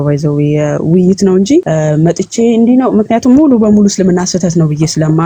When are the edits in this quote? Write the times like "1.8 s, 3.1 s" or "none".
1.7 s